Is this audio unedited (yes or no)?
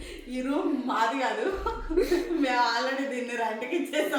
yes